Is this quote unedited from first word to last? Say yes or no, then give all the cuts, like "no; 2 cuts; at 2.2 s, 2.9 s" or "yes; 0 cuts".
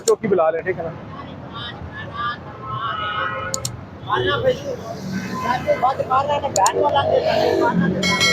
yes; 0 cuts